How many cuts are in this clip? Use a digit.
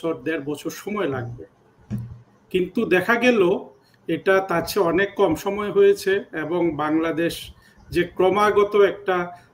0